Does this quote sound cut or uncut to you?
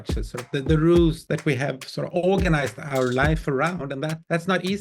cut